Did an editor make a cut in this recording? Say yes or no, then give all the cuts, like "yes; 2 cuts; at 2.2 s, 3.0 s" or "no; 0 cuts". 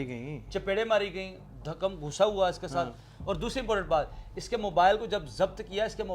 no; 0 cuts